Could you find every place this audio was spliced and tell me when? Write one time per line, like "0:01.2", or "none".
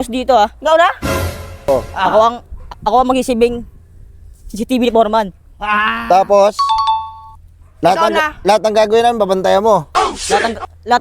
0:01.7